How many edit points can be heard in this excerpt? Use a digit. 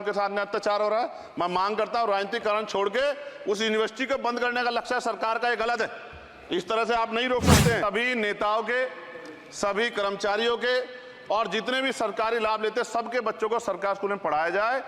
1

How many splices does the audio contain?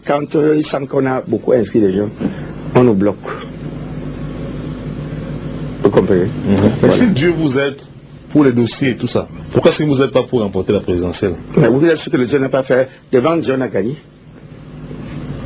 1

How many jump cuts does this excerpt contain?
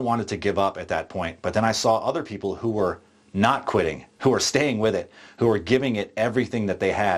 0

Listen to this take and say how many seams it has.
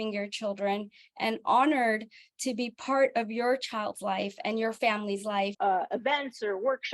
1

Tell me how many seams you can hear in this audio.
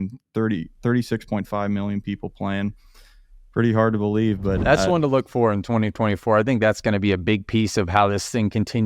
1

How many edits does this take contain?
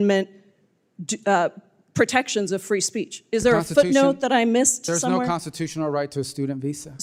0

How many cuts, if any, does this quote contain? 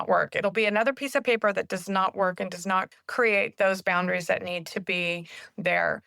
1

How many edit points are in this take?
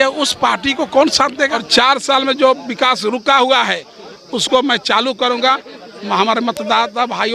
1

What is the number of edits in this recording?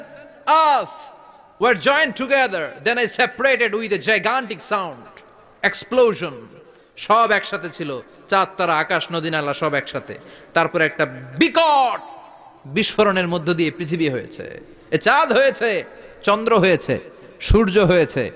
0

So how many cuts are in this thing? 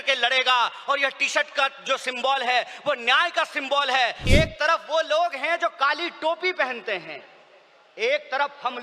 1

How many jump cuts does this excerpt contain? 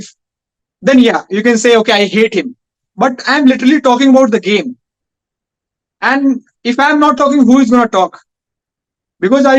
0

